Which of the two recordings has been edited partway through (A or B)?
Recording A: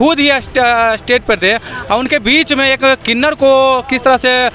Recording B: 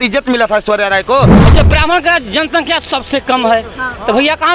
B